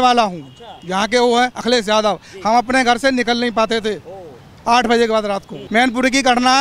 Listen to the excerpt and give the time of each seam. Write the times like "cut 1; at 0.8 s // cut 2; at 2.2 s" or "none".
cut 1; at 5.5 s